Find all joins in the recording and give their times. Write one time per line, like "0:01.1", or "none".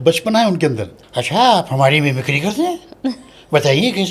0:00.9